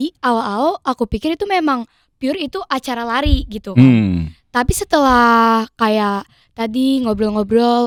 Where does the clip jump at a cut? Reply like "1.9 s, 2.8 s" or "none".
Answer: none